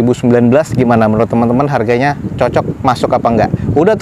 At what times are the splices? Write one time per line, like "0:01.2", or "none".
none